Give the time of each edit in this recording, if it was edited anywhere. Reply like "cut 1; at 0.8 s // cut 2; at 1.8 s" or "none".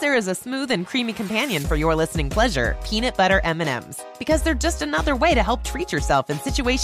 none